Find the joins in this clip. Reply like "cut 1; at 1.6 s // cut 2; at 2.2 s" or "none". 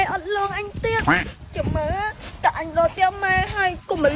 none